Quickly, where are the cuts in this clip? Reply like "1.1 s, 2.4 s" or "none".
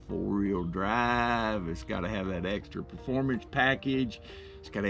none